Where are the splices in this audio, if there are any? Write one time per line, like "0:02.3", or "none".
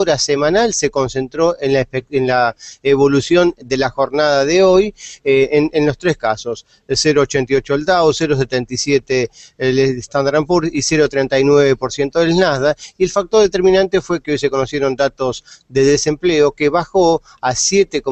0:04.7